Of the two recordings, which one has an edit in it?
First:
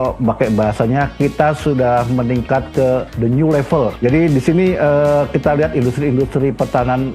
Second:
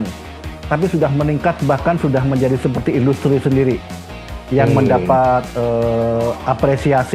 first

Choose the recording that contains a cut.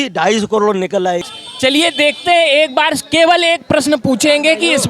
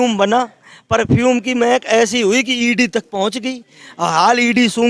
first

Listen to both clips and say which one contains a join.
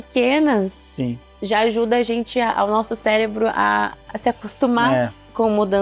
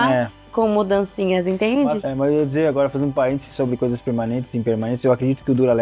second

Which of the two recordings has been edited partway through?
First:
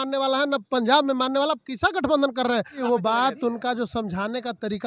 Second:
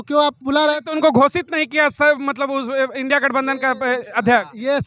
first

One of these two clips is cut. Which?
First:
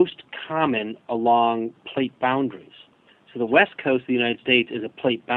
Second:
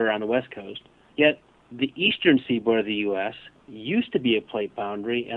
first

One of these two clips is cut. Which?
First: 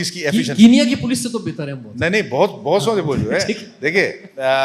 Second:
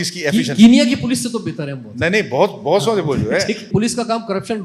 second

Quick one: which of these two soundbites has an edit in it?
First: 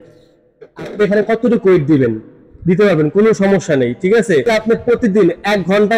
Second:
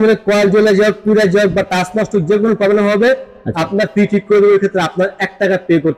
first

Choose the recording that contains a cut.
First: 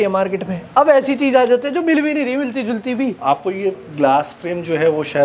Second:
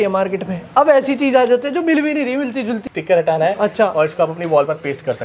second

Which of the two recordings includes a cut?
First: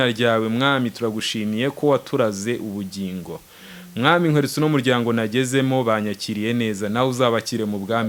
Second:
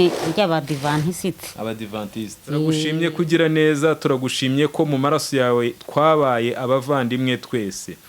second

